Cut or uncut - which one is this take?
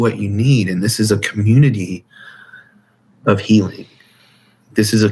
uncut